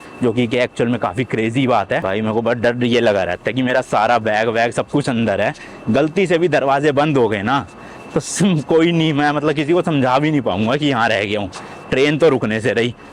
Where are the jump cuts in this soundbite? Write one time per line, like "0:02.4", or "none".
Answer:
none